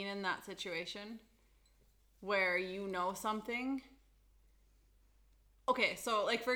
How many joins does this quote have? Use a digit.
0